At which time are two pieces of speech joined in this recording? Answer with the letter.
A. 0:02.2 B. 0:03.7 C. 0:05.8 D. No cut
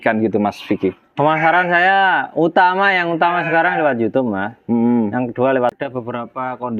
C